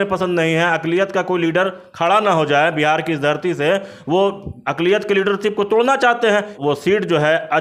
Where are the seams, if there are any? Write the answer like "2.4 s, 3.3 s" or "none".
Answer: 6.5 s